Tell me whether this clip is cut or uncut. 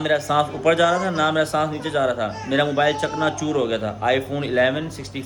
uncut